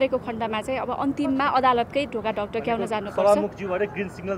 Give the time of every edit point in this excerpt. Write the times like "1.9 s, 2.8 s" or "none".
none